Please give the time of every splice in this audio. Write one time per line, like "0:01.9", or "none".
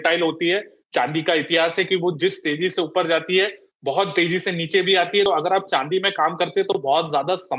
0:05.3